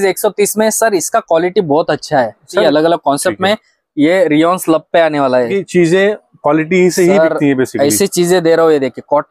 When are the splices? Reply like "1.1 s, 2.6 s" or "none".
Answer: 2.6 s, 5.5 s